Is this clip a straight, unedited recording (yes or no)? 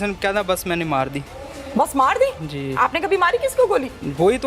yes